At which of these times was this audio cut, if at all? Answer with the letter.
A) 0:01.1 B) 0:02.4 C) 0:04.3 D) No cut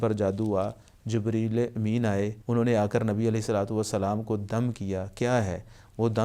B